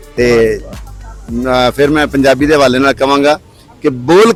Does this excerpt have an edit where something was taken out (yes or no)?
no